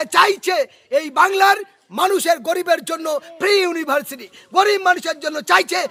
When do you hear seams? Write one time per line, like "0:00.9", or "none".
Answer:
none